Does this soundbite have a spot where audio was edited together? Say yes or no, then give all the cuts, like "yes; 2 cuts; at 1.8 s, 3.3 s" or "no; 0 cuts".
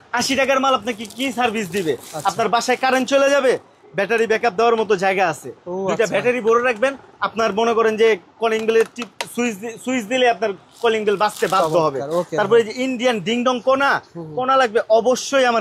no; 0 cuts